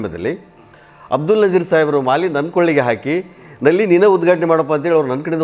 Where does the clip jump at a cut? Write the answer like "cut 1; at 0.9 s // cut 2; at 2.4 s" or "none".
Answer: none